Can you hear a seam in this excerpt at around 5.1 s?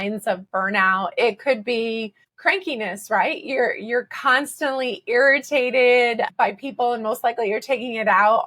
no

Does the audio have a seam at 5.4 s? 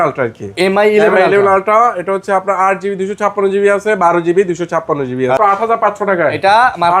yes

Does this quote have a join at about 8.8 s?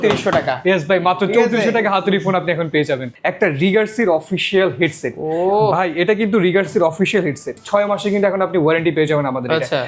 no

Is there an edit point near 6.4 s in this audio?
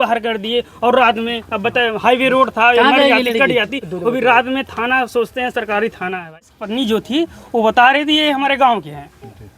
yes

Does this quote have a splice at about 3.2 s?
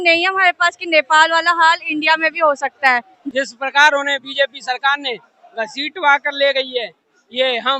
yes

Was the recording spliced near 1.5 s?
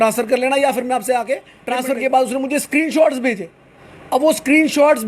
yes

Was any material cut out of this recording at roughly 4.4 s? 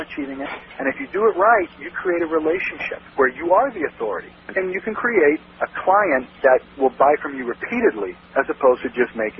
yes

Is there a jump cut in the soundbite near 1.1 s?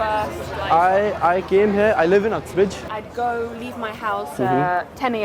no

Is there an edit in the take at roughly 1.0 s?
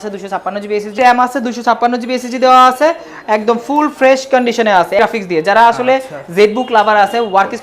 yes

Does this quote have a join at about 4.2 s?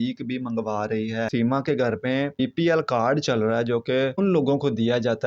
yes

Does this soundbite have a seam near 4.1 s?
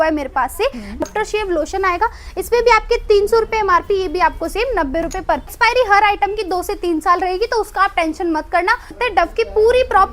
no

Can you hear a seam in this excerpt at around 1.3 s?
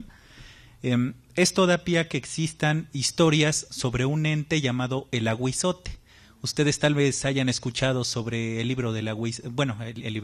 no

